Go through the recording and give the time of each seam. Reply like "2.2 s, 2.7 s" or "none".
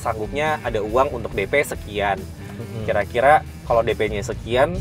none